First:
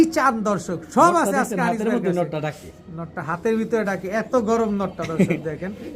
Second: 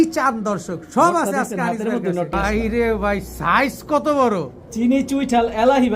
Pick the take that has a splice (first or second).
second